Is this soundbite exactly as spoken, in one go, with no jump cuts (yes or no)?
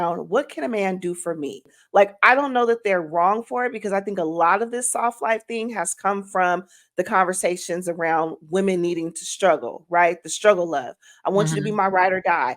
no